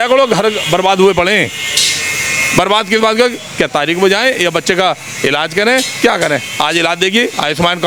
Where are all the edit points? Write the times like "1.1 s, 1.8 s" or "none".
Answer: none